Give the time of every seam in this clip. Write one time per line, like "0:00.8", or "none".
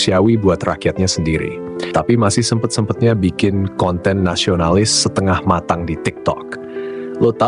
none

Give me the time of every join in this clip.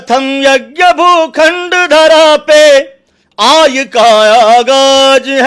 none

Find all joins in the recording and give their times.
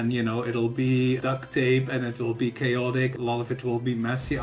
0:01.2
0:03.1

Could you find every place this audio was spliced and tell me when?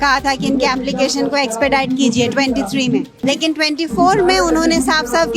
0:03.1

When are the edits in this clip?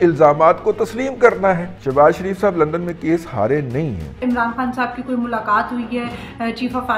0:01.7
0:04.2

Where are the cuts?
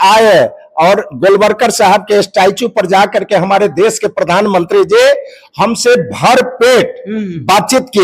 none

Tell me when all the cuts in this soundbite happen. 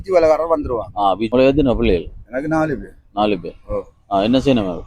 0:01.2

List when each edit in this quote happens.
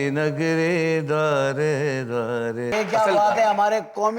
0:02.7

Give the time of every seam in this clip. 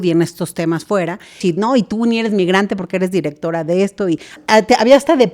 0:01.4
0:04.4

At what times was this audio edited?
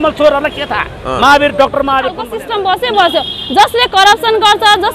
0:02.3

